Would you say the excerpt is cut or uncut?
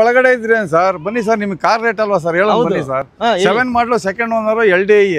uncut